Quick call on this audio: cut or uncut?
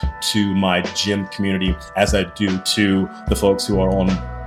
uncut